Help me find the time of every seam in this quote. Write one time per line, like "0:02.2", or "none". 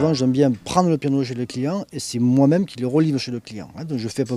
0:01.4